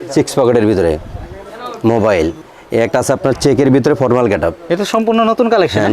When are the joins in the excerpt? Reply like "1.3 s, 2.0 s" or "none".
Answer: 2.4 s, 4.7 s